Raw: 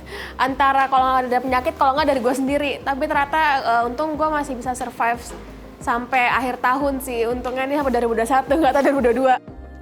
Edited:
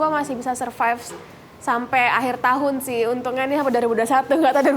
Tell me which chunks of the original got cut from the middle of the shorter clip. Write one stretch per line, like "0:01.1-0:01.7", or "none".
none